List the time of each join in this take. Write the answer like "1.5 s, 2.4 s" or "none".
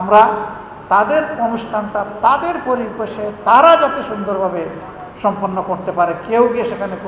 none